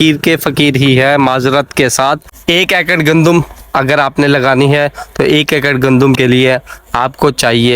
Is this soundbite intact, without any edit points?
no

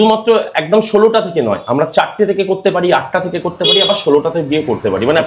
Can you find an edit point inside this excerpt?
no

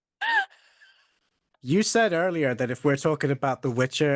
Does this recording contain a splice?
yes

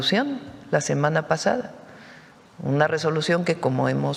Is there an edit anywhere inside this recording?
no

